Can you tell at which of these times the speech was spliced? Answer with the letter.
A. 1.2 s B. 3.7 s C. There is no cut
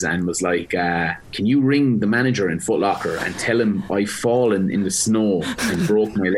A